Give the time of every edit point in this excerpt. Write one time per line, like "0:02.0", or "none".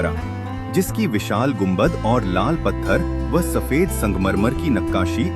none